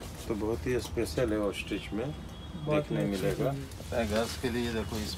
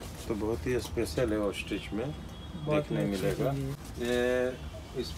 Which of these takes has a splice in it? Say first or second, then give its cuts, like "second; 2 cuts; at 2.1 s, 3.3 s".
first; 1 cut; at 3.7 s